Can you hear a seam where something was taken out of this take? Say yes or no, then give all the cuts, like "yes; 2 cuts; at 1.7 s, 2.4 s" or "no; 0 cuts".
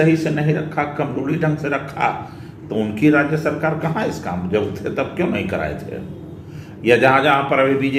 no; 0 cuts